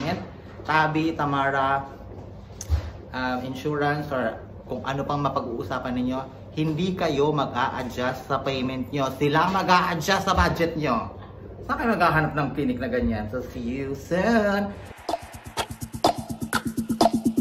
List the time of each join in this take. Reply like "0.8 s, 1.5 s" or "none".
14.9 s

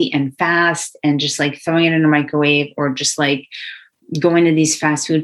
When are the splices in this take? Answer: none

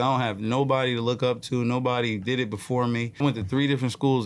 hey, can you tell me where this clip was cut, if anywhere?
3.2 s

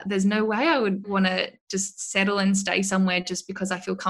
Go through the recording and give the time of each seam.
none

